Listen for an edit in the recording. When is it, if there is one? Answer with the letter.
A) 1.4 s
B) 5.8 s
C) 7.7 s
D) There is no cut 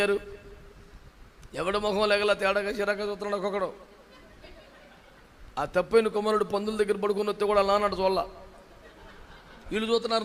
D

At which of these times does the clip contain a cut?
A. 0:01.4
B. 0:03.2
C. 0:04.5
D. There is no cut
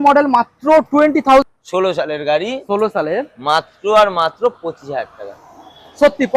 A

